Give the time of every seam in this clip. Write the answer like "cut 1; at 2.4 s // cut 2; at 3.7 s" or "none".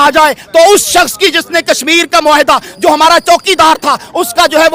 none